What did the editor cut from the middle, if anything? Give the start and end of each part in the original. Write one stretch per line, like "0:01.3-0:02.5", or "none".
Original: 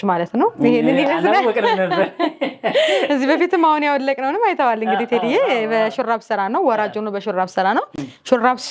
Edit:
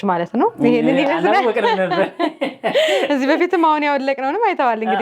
none